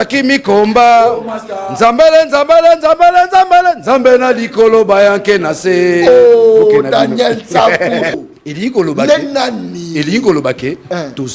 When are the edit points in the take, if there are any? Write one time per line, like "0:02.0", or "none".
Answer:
0:08.2